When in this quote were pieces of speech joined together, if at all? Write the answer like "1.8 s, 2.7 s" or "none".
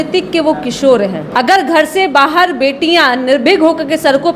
1.2 s

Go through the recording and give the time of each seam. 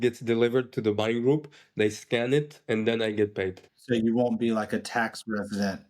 3.7 s

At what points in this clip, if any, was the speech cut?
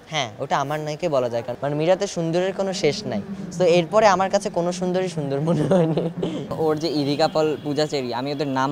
1.5 s, 6.5 s

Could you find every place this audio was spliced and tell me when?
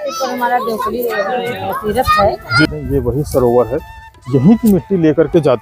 2.7 s

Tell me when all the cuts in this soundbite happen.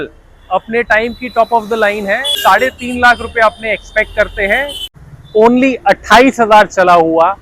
2.3 s, 4.8 s

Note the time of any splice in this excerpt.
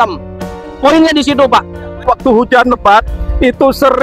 2.1 s

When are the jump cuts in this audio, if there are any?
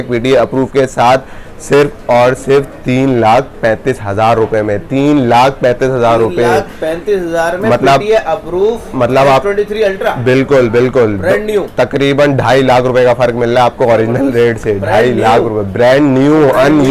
none

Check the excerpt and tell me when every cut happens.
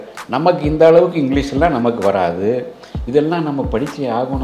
none

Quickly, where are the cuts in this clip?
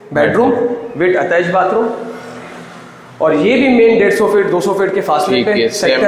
none

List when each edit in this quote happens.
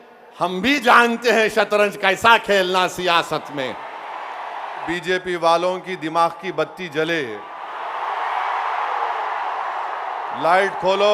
4.9 s

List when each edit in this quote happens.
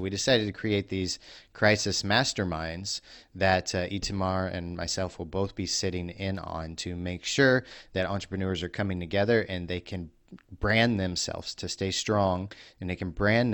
none

